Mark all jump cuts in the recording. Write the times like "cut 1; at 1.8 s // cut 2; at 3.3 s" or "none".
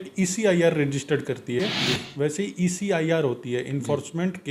cut 1; at 1.6 s